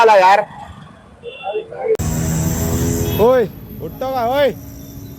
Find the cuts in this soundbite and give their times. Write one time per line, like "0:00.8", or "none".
0:01.9